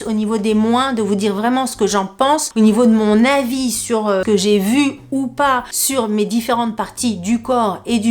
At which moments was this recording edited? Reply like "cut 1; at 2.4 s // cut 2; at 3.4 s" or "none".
cut 1; at 2.5 s // cut 2; at 4.2 s // cut 3; at 5.8 s